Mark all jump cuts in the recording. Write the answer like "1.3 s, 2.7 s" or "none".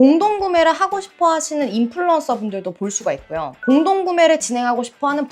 none